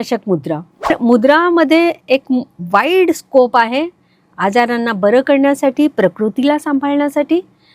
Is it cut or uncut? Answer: cut